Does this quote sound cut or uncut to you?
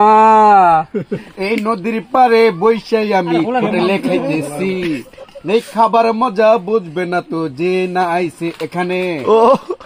cut